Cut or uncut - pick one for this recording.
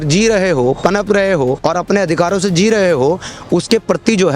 cut